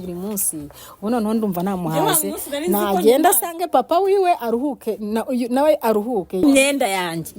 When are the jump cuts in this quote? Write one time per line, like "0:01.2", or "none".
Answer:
0:06.4